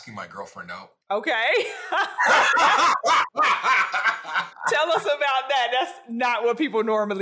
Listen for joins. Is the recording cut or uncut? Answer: cut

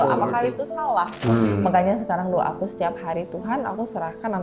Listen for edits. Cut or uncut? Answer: cut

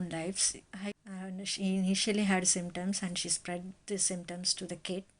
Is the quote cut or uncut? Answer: cut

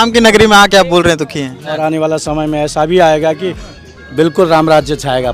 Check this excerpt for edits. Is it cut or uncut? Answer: cut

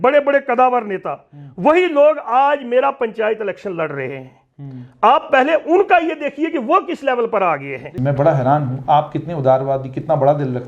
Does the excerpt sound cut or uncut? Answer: cut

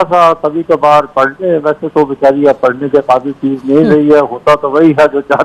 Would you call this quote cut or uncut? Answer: uncut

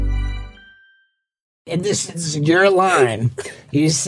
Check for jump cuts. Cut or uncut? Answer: cut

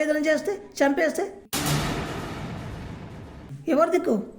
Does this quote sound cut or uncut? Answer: uncut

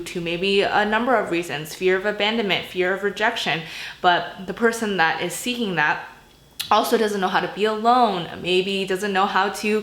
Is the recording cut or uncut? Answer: uncut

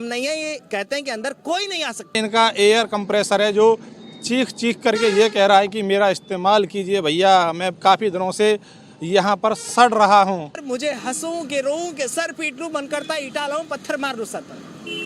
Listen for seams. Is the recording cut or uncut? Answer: cut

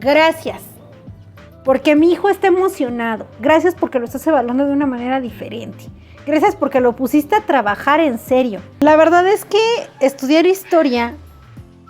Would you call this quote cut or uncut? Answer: cut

